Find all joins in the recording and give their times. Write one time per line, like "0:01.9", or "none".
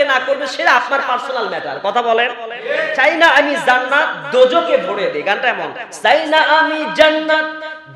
0:03.0